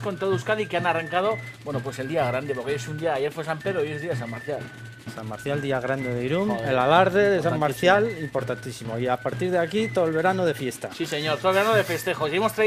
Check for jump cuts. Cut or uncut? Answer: uncut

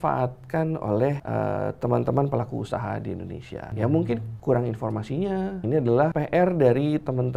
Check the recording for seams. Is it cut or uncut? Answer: cut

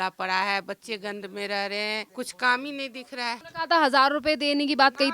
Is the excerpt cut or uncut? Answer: cut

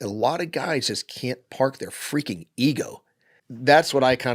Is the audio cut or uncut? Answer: cut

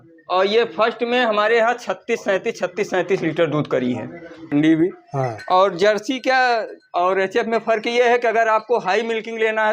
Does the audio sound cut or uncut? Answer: cut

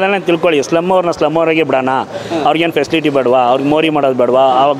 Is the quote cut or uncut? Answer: uncut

